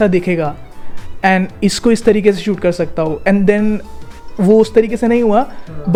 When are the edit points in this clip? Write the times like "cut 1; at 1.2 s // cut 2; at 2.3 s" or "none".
none